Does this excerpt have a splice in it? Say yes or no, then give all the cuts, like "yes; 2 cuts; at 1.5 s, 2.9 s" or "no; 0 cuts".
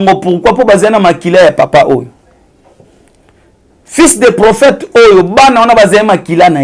no; 0 cuts